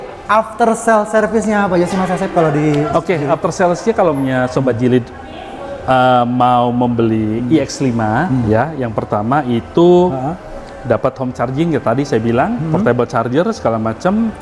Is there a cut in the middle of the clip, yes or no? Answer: no